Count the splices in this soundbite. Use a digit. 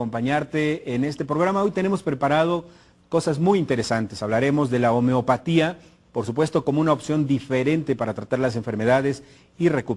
1